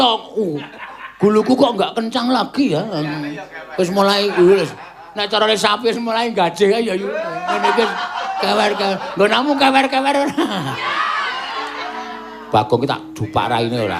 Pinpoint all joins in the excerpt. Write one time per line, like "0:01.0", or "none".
none